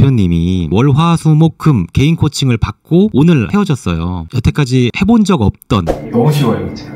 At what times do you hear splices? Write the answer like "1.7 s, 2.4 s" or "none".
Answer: 5.9 s